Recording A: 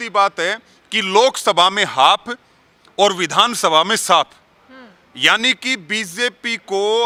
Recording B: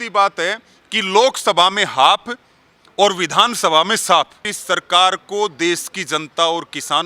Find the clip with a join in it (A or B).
B